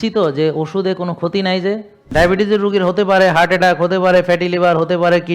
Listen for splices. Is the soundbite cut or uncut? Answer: cut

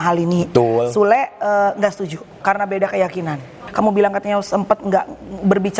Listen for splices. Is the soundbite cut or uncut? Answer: cut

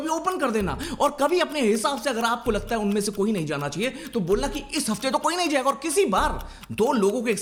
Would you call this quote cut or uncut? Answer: uncut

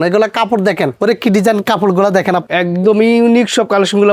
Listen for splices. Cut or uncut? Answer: cut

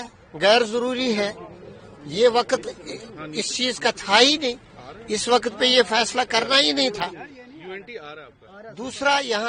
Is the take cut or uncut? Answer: uncut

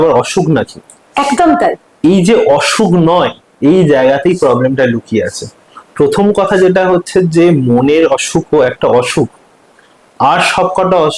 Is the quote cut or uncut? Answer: uncut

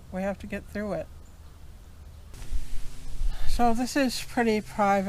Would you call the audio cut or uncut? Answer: cut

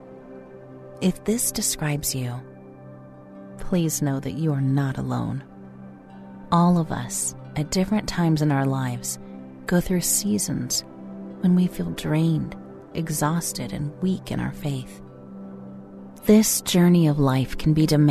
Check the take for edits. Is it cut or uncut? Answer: cut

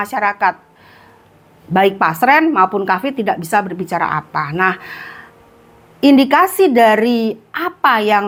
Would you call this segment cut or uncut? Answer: uncut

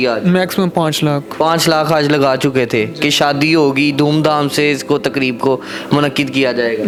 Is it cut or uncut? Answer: uncut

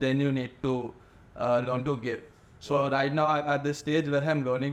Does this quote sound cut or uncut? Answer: uncut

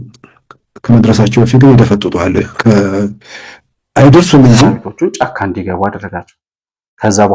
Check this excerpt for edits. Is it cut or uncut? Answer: cut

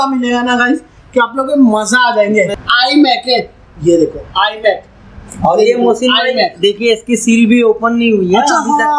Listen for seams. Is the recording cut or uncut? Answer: cut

